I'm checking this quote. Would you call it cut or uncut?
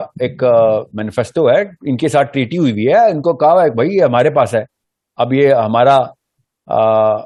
uncut